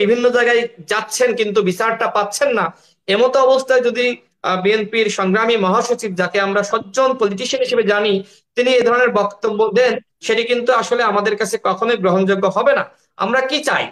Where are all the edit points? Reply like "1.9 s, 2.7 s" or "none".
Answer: none